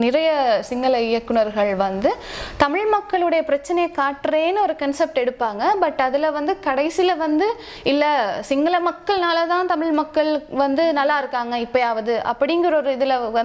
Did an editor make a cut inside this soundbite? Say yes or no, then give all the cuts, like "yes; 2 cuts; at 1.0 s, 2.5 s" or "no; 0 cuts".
no; 0 cuts